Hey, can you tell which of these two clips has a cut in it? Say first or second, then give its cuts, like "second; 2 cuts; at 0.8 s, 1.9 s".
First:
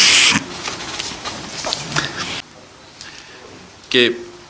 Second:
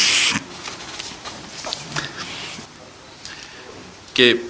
first; 1 cut; at 2.4 s